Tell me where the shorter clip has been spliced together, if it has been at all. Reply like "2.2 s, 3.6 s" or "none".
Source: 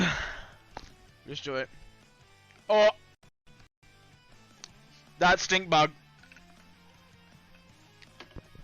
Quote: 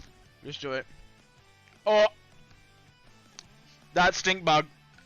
2.5 s